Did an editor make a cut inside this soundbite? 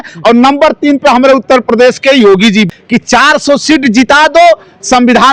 yes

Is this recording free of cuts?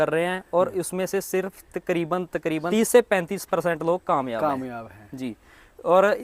yes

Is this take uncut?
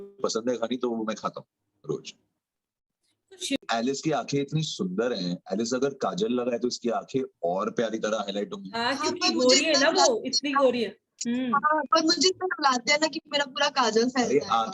no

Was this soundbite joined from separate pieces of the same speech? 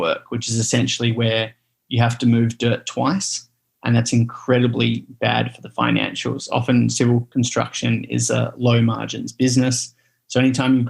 yes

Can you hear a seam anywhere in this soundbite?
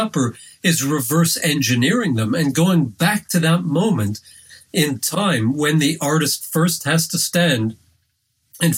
no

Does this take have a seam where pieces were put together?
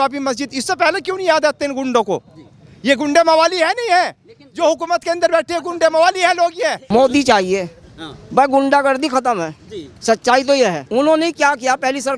yes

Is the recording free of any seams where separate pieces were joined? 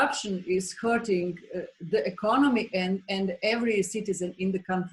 yes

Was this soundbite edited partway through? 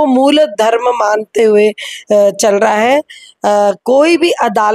no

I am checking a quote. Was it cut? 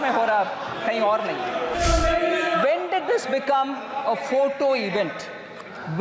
yes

